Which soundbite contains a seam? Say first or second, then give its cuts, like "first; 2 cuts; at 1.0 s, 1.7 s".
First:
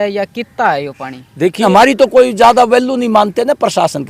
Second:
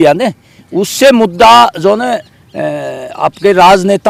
first; 1 cut; at 1.6 s